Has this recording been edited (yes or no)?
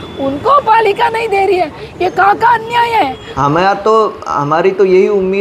yes